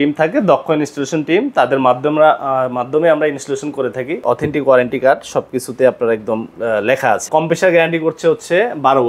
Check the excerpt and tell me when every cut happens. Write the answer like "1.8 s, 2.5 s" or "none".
4.2 s, 7.3 s